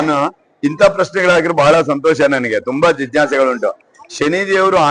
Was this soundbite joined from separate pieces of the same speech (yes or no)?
no